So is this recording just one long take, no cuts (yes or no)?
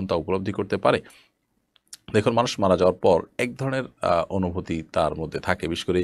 yes